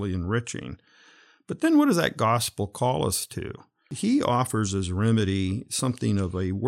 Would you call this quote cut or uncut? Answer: cut